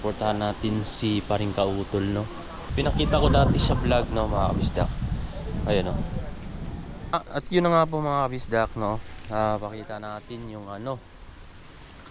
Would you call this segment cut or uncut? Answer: cut